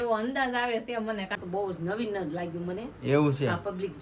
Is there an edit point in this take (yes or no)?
yes